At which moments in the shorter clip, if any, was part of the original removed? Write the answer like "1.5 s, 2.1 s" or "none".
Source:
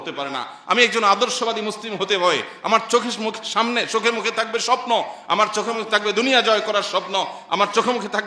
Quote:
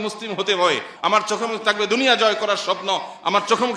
0.9 s

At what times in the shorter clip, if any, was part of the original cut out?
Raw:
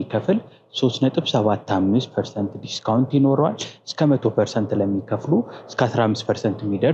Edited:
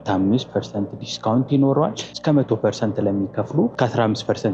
2.1 s, 3.7 s

